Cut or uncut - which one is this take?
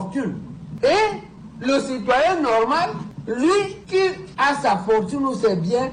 uncut